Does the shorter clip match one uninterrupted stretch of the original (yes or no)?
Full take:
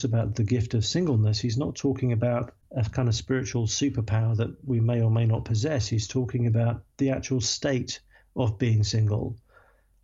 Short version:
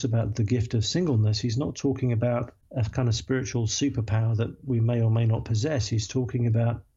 yes